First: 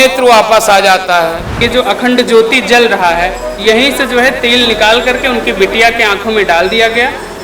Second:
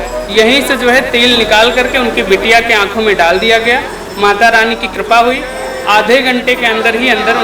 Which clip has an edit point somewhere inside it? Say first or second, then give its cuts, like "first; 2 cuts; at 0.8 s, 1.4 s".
first; 1 cut; at 1.6 s